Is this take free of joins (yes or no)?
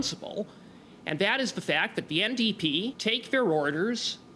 no